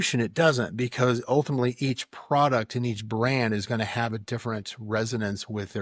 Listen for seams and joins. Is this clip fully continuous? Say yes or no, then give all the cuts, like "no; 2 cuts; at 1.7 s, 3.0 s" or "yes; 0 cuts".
yes; 0 cuts